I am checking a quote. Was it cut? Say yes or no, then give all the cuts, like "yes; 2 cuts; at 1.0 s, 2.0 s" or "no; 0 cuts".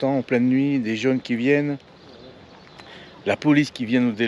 no; 0 cuts